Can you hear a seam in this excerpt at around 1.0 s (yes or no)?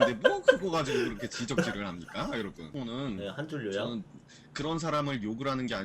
no